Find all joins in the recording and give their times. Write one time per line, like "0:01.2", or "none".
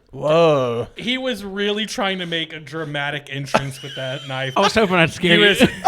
0:00.9
0:04.6

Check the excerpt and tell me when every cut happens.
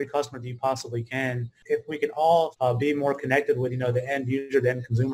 0:01.5
0:02.5

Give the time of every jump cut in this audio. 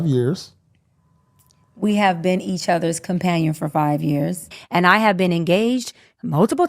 0:04.5

